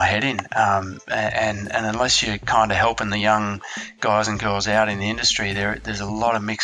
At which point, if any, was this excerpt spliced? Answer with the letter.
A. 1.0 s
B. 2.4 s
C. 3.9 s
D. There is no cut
D